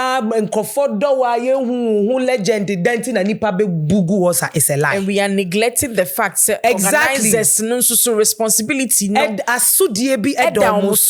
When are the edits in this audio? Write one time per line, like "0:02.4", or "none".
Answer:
none